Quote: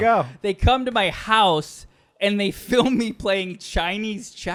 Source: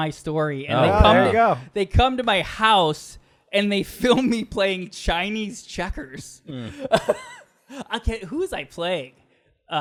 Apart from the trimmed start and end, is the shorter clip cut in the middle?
no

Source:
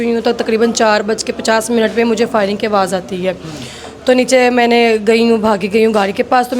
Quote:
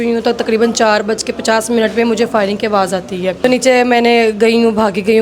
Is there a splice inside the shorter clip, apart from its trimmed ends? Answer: yes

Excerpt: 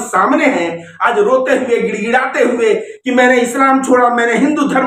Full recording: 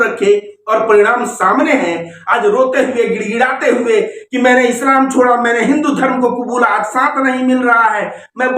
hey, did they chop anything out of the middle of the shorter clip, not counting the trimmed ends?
no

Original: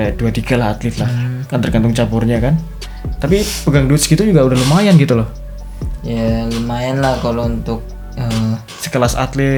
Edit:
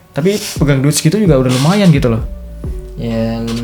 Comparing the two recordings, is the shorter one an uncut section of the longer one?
yes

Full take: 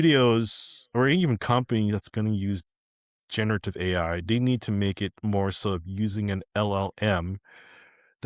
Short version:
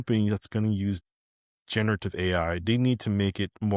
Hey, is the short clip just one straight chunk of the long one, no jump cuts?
yes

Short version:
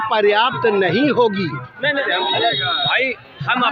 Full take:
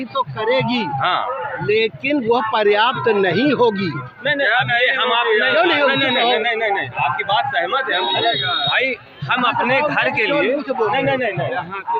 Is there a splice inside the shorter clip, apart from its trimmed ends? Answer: yes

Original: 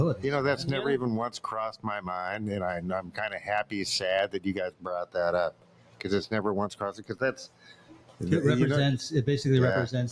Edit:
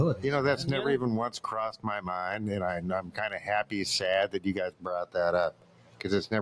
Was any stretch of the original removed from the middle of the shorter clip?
no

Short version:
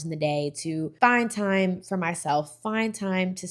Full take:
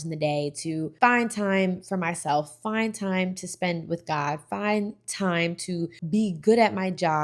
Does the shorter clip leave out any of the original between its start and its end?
no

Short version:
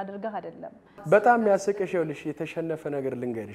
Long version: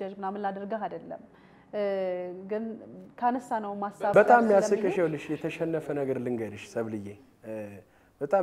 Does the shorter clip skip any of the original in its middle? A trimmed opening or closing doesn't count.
yes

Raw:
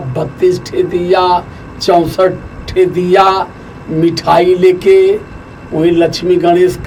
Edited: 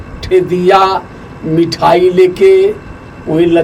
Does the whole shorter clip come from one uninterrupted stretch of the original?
yes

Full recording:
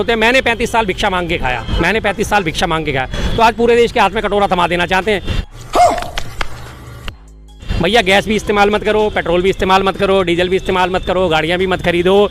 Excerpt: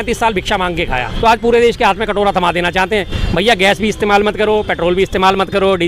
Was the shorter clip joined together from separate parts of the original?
yes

